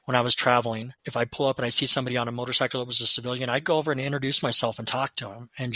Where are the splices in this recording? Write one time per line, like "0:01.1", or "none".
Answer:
0:00.9